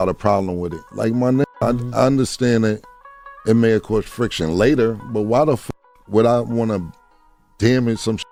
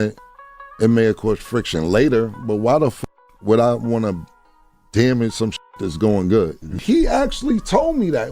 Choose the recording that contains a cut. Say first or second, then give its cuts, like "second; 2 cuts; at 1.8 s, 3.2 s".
second; 1 cut; at 6.8 s